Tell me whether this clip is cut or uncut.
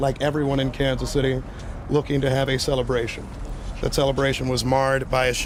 uncut